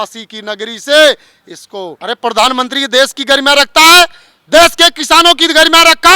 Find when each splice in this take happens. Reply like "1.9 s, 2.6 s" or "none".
2.0 s